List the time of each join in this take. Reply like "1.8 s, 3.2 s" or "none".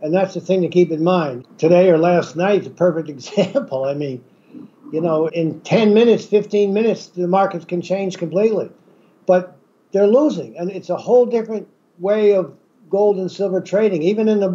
1.4 s, 5.3 s